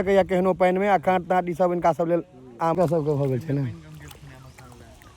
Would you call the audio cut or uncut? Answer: cut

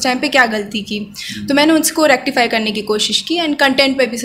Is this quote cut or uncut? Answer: uncut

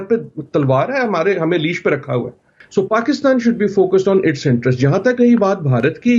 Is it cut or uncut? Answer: cut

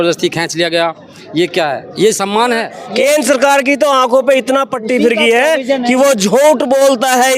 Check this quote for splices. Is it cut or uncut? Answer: cut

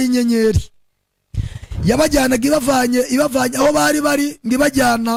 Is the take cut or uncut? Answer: uncut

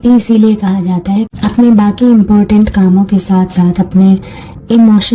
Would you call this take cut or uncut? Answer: cut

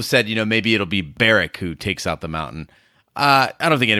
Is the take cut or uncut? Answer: cut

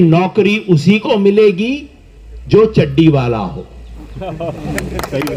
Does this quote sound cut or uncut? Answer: uncut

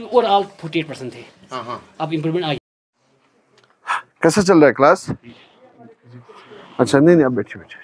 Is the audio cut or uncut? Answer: cut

